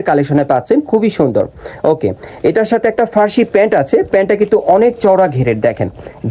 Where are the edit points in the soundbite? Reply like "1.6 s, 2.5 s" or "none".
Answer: none